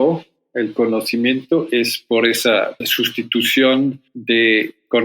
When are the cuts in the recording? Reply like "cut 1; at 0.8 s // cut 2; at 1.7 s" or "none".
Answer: cut 1; at 2.0 s